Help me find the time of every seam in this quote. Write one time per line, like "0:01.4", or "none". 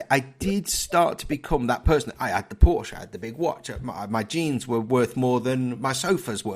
none